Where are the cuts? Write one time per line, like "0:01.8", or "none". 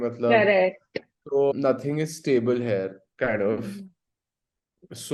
none